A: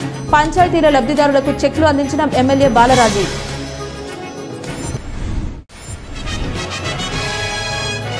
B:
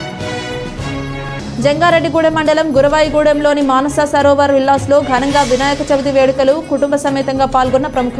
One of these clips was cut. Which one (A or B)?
B